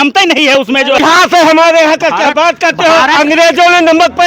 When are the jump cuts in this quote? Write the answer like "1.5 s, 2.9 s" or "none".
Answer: 1.0 s